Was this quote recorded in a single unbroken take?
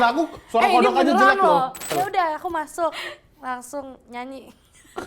no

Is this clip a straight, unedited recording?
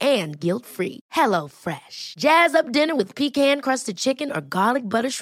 yes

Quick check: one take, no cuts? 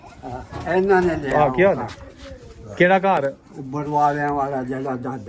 yes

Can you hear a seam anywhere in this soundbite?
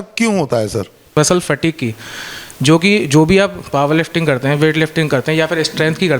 yes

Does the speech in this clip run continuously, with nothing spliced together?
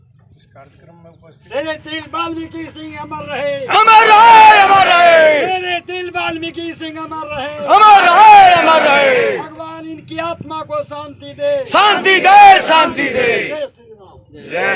no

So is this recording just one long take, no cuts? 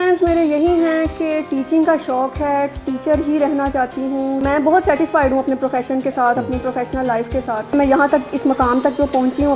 no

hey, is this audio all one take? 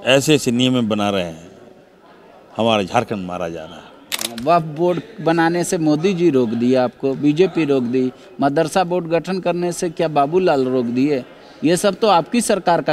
no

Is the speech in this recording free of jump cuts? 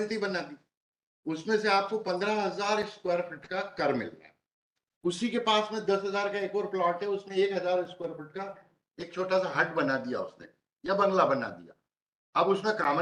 yes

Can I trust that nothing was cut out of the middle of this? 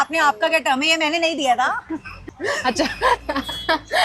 yes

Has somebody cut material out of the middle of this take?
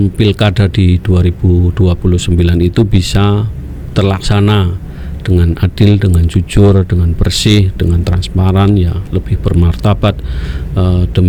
no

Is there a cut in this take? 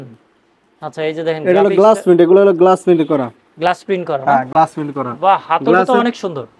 no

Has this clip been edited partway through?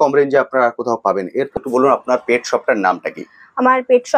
yes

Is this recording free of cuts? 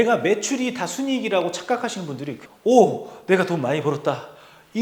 no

